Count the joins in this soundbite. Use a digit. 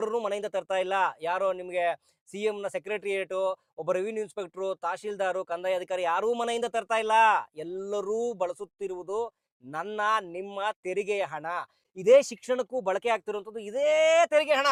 0